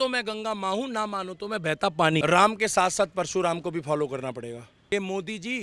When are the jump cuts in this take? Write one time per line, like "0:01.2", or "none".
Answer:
0:02.2
0:04.7